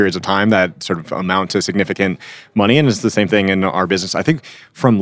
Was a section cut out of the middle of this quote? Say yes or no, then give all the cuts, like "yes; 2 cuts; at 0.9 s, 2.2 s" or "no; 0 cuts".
yes; 1 cut; at 1.2 s